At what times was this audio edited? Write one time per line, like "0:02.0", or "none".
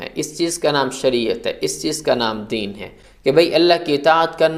none